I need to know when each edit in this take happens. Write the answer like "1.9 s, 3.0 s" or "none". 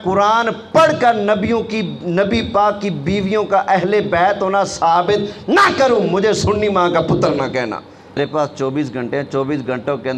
8.2 s